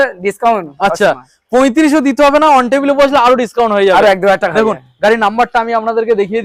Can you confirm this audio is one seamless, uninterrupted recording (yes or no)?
yes